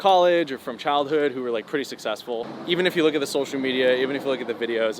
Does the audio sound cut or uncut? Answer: cut